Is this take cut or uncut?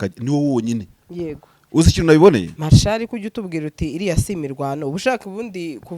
cut